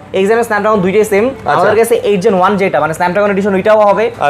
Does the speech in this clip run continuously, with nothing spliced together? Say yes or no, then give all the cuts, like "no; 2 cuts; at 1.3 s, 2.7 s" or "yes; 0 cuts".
yes; 0 cuts